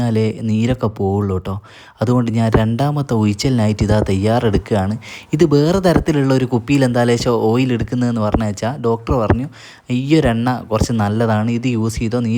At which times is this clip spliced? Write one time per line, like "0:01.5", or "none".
none